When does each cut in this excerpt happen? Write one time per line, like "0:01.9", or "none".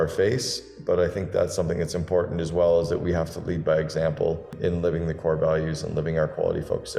none